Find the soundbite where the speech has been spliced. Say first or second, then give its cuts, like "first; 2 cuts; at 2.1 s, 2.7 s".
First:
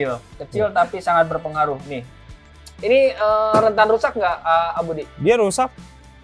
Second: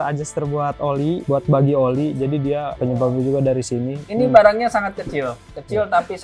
second; 3 cuts; at 1.2 s, 2.7 s, 4.0 s